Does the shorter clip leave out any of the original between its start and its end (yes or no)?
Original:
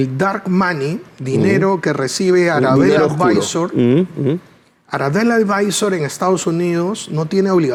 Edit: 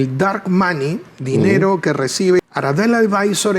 yes